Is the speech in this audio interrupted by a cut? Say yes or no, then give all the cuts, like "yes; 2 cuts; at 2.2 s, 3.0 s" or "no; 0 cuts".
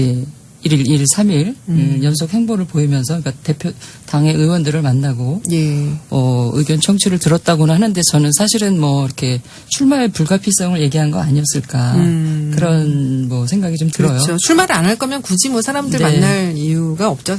yes; 1 cut; at 13.7 s